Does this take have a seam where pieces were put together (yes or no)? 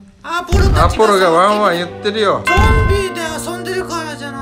no